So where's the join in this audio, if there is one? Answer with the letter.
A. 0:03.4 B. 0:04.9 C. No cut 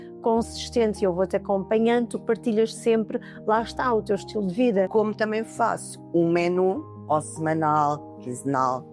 B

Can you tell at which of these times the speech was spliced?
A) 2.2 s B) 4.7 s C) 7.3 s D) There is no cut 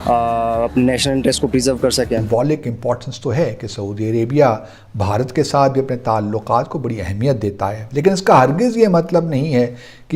A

